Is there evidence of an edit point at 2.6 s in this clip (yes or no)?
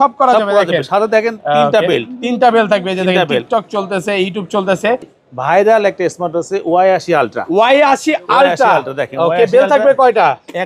no